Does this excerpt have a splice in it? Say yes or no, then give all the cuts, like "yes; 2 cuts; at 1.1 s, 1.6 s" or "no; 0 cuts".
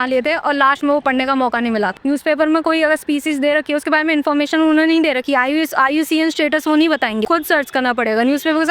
yes; 2 cuts; at 2.0 s, 7.2 s